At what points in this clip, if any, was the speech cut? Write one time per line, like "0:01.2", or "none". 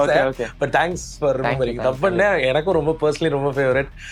none